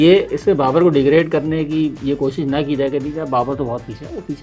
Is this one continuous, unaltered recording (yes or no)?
yes